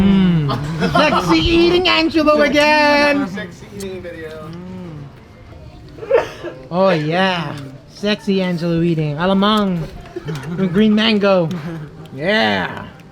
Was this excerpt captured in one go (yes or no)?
no